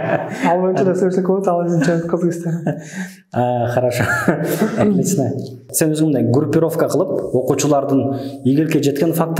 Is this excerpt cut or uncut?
cut